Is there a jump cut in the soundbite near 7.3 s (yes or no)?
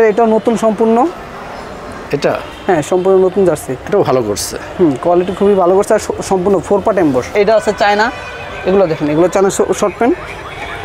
yes